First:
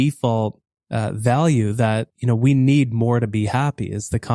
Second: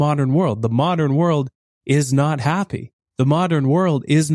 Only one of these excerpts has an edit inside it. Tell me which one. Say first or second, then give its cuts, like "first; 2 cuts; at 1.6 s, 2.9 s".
first; 1 cut; at 2.1 s